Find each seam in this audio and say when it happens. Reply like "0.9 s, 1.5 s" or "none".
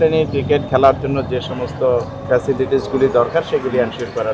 none